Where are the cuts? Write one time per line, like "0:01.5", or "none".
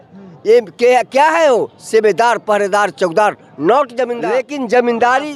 none